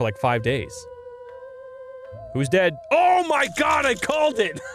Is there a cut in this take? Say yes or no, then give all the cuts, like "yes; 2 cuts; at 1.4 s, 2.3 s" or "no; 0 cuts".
no; 0 cuts